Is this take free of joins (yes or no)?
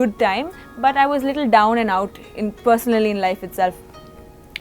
yes